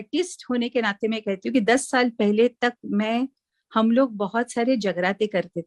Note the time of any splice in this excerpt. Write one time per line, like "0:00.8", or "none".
none